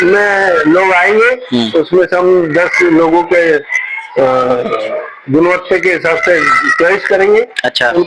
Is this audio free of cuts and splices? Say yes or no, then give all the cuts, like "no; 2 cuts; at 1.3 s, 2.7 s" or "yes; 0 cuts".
yes; 0 cuts